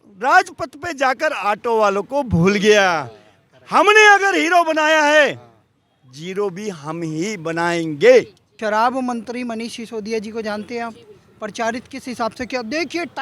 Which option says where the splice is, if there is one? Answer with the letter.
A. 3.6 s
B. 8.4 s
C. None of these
B